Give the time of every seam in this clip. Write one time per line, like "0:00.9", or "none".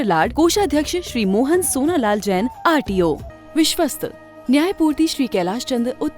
0:03.3